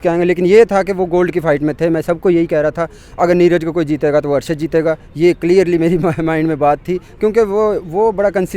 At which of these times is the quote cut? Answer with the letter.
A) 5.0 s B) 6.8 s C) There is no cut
C